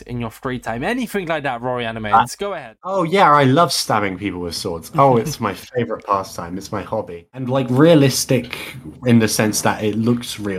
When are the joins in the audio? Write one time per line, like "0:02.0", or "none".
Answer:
0:02.9
0:07.4